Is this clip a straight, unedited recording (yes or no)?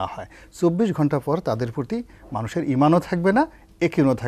yes